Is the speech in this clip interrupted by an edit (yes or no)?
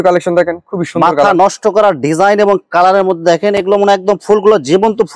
no